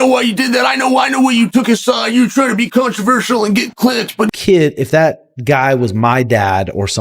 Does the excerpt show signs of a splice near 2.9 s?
no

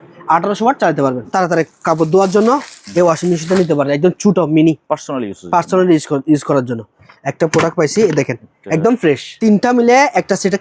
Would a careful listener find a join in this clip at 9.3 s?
yes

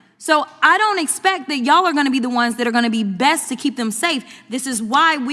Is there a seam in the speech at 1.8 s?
no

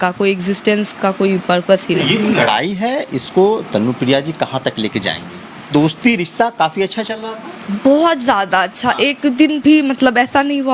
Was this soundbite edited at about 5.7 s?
yes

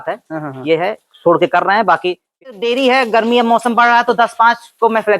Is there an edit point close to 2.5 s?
yes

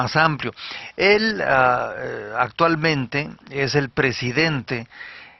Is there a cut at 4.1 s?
no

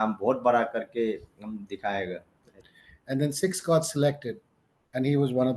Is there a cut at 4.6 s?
no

